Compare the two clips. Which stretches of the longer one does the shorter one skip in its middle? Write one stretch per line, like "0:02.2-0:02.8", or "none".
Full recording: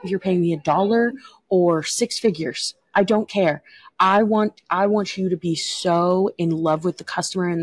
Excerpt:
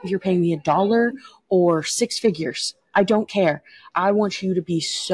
0:03.8-0:04.6